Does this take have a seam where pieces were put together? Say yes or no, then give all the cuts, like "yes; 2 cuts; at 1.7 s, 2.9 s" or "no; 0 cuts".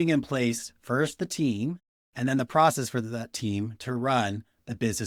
no; 0 cuts